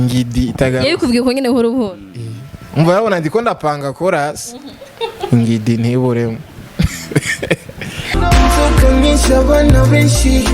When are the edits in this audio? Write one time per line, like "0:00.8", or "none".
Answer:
none